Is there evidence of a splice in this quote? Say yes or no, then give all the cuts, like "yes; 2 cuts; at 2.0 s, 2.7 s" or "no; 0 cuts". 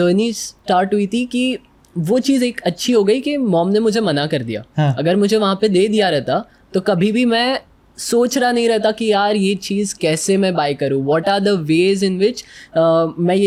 no; 0 cuts